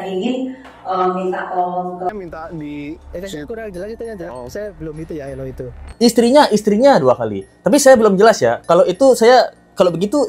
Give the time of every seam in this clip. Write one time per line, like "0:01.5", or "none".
0:02.1
0:05.9